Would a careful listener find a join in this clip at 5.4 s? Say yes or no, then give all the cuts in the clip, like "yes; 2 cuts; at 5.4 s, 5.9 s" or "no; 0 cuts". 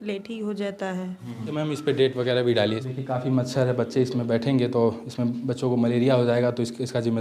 no; 2 cuts; at 1.5 s, 2.9 s